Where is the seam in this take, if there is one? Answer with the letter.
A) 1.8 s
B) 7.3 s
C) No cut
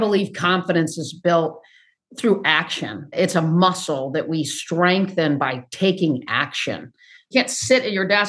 B